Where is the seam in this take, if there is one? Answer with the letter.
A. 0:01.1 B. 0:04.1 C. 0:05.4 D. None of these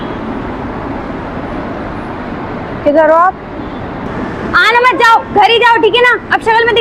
B